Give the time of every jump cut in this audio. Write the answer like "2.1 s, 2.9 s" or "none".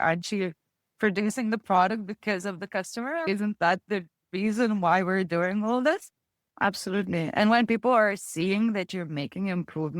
3.2 s, 6.4 s